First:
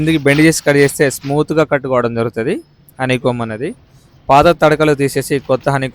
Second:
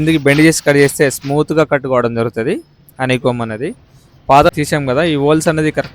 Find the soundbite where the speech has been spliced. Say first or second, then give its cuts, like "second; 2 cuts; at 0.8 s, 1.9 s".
second; 1 cut; at 4.5 s